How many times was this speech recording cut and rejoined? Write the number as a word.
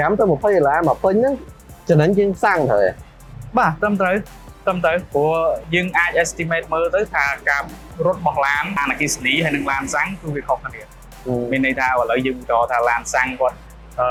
zero